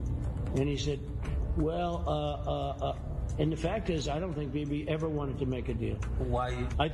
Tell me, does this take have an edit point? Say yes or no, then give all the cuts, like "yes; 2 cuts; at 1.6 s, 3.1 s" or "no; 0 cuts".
no; 0 cuts